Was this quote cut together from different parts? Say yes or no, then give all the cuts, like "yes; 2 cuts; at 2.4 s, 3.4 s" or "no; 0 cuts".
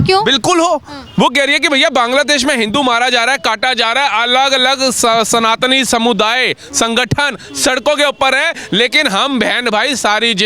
no; 0 cuts